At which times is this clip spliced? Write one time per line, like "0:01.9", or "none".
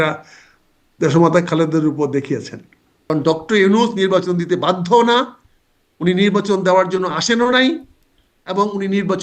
0:03.1